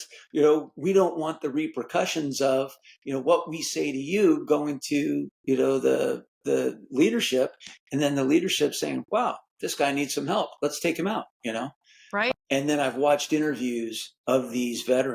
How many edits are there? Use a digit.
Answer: 1